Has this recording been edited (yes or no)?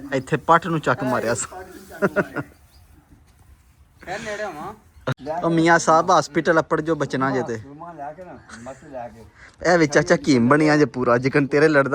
yes